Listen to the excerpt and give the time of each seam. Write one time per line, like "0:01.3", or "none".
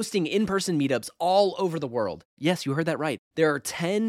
none